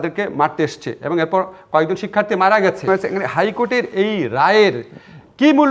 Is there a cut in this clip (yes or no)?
yes